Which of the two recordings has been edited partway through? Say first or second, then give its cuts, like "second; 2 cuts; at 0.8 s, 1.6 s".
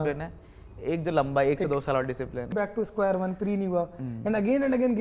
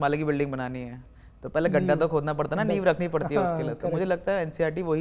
first; 1 cut; at 2.5 s